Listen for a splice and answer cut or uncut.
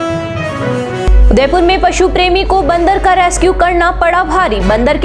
uncut